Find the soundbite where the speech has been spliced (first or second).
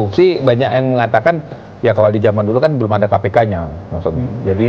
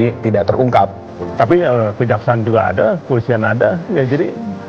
second